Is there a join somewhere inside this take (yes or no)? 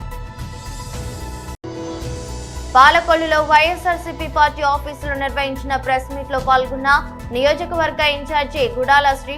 no